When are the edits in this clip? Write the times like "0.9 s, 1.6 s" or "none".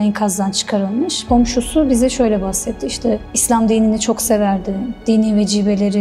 1.2 s